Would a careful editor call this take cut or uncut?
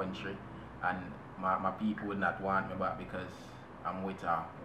uncut